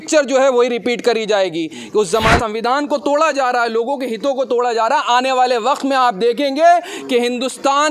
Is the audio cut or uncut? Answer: cut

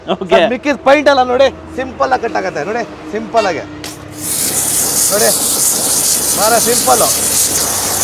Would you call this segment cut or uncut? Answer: uncut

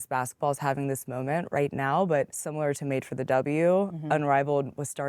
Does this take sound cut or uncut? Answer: cut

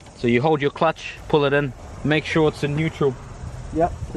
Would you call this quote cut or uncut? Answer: cut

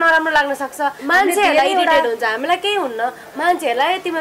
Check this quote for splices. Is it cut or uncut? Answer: cut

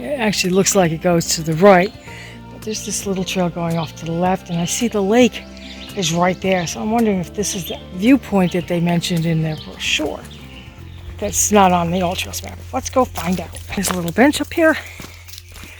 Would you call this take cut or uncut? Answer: cut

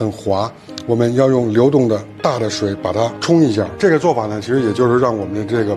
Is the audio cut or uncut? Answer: cut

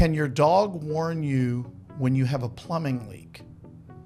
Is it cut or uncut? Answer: uncut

